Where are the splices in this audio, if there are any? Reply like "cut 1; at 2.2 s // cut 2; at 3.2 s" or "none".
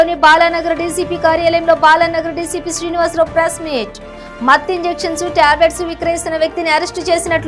none